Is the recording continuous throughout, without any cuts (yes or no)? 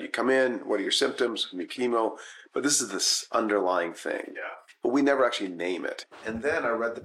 yes